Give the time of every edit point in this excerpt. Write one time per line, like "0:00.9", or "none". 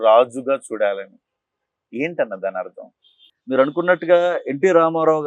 0:03.3

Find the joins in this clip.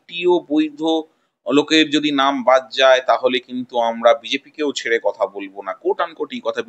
none

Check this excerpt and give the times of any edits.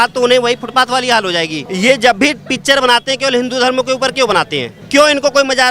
0:01.6
0:04.7

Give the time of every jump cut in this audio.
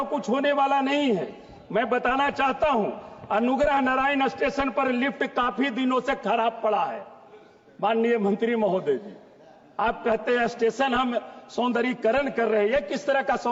none

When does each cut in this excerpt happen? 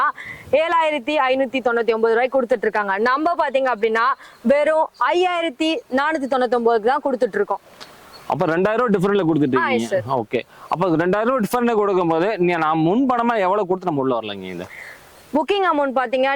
none

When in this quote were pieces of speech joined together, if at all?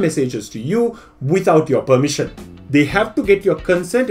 none

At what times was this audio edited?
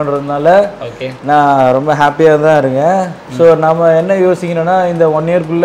none

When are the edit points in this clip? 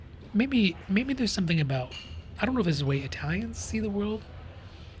none

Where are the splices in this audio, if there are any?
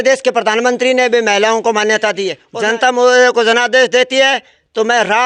0:02.4

